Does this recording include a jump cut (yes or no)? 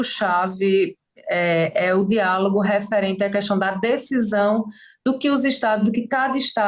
no